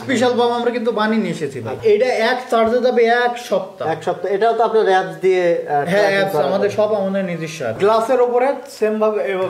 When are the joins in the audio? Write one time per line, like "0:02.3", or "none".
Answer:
0:01.7
0:07.7